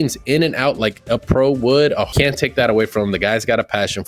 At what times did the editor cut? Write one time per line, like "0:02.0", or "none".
0:02.1